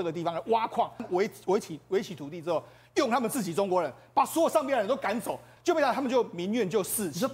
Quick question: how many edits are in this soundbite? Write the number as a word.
two